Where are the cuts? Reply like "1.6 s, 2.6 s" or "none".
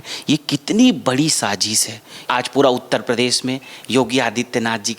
2.2 s